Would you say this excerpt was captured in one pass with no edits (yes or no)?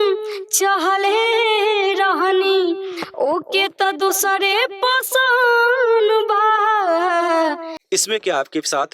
no